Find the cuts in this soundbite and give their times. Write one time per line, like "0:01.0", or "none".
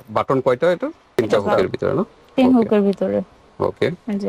0:01.4